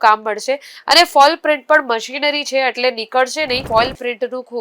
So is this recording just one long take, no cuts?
no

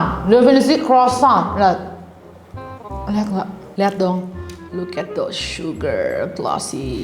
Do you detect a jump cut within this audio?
yes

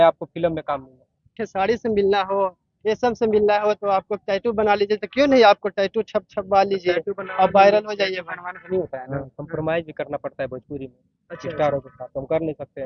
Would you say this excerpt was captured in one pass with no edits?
no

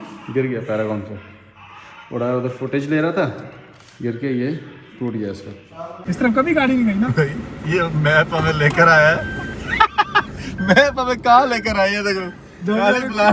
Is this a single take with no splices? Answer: no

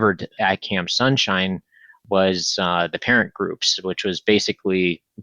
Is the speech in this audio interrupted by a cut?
no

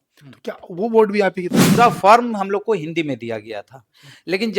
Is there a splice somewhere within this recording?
yes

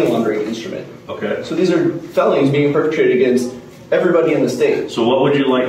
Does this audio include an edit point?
no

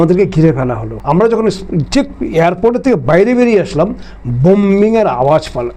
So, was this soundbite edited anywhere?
no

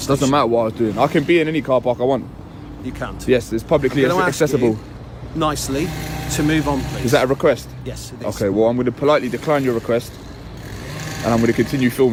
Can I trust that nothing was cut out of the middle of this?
yes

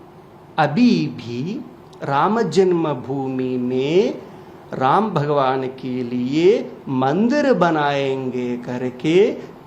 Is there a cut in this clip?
no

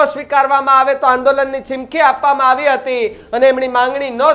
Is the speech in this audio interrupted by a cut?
no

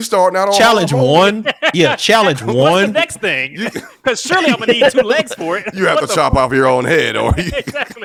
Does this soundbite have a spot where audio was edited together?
no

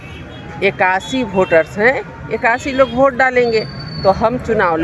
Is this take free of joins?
yes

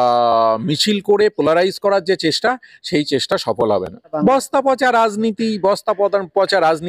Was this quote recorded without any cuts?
no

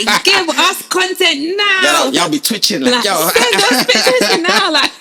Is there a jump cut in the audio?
no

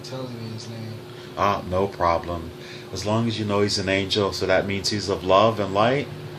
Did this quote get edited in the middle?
no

